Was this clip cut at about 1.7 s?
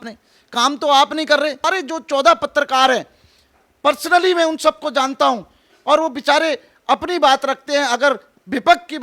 yes; 1 cut; at 1.7 s

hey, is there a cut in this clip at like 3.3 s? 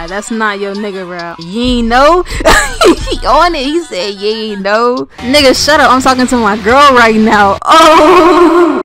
no; 2 cuts; at 1.4 s, 5.1 s

